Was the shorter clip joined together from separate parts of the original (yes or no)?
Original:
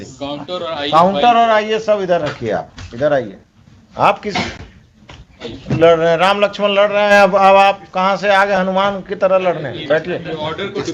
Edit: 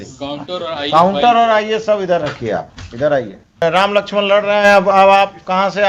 yes